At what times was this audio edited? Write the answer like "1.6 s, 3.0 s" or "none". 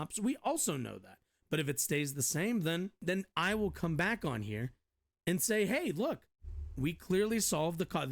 3.0 s